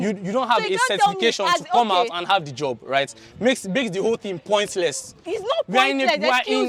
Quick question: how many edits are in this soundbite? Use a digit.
0